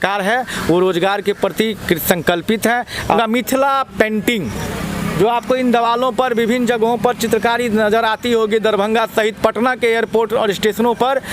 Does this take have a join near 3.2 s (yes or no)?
yes